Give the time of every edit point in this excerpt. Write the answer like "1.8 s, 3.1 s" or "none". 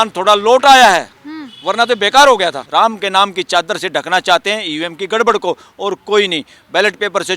2.7 s